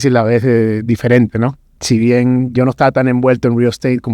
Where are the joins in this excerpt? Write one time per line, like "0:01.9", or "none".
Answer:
0:01.7